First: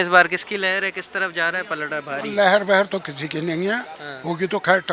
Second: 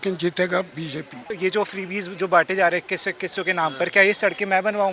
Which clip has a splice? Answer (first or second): second